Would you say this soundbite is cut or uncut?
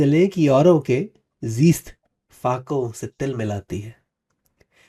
uncut